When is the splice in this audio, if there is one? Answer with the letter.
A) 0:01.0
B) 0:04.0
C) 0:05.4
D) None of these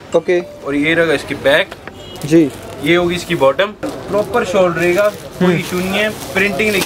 B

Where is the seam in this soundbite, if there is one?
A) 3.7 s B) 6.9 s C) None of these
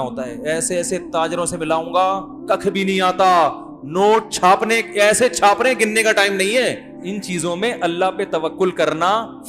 B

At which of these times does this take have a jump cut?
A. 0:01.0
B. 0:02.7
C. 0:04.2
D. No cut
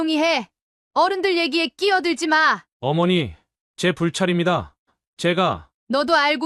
B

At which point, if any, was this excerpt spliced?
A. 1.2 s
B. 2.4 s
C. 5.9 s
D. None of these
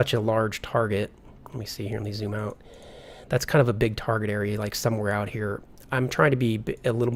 D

